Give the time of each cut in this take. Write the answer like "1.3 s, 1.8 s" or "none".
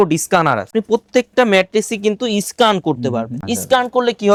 none